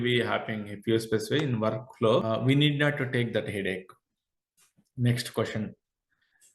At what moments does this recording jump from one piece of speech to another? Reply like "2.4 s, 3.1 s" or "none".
2.2 s